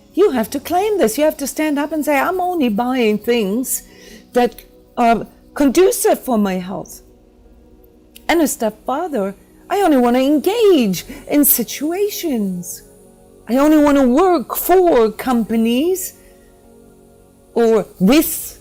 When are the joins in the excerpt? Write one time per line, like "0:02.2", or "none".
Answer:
none